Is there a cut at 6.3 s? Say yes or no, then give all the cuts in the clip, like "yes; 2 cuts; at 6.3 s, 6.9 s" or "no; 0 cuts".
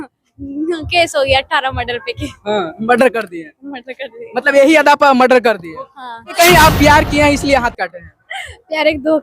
yes; 1 cut; at 6.3 s